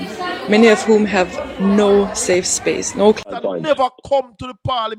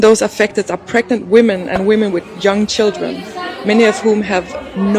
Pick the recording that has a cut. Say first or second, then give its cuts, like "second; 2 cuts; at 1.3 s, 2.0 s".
first; 1 cut; at 3.2 s